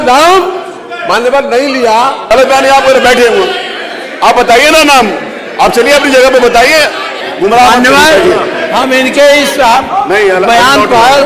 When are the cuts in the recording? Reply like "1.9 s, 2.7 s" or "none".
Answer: 2.3 s, 7.2 s